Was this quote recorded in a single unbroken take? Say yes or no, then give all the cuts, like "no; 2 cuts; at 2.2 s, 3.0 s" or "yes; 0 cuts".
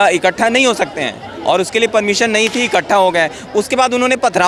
yes; 0 cuts